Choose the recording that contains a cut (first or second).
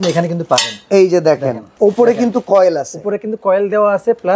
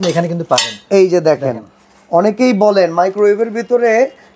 first